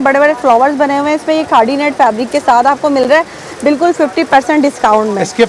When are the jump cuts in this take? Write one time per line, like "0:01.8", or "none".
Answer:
none